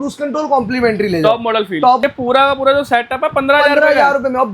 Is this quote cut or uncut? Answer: cut